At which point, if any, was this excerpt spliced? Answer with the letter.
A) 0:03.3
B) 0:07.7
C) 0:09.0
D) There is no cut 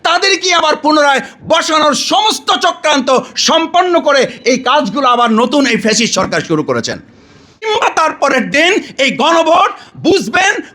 B